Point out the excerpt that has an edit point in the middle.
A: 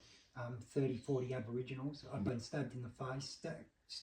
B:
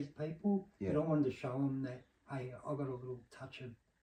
A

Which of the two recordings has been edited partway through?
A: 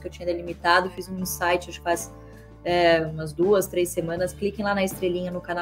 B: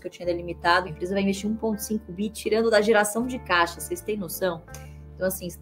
B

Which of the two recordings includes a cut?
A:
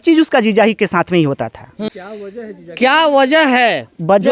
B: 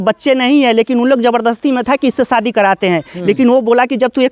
A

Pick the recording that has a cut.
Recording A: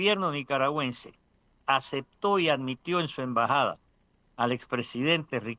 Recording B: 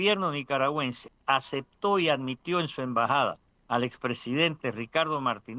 B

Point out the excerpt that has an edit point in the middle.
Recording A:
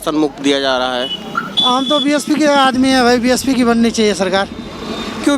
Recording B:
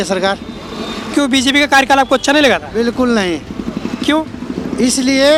A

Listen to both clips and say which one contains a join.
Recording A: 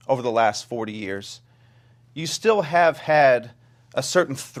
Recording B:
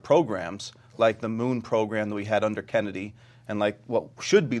B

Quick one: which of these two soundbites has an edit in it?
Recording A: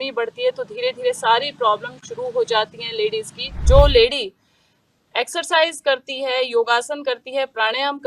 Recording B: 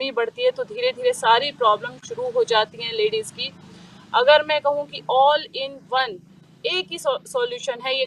A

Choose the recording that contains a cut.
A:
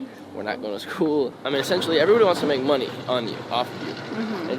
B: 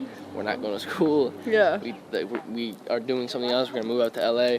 A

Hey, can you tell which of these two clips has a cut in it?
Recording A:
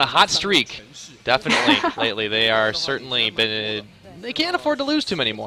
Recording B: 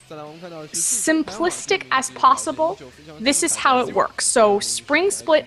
B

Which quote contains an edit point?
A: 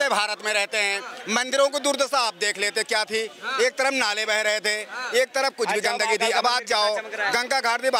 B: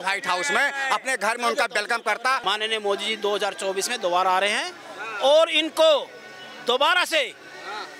B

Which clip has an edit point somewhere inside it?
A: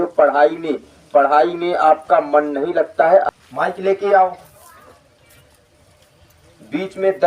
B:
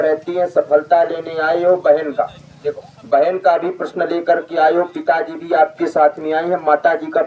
A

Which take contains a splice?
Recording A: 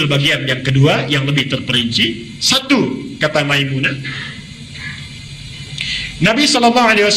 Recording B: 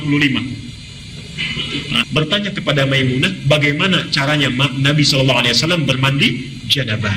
B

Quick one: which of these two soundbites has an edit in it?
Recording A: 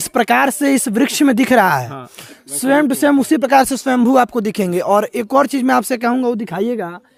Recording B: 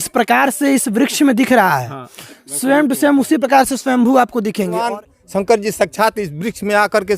B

